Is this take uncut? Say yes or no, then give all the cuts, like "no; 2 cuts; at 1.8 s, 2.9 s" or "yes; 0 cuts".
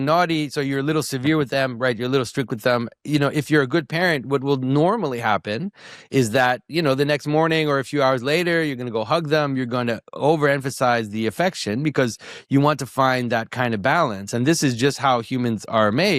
yes; 0 cuts